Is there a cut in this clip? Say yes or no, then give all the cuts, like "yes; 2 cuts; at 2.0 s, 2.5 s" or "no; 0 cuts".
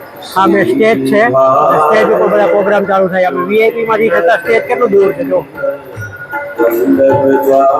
no; 0 cuts